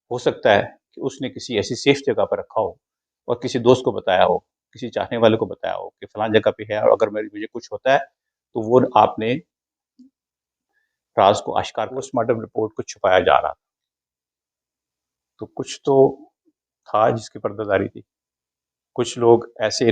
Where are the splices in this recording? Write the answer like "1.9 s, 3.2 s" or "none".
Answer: 12.1 s